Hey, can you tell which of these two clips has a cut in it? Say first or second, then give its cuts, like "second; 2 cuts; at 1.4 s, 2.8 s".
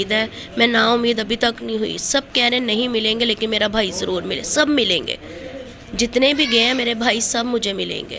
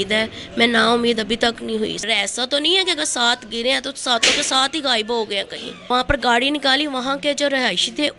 second; 2 cuts; at 2.0 s, 5.7 s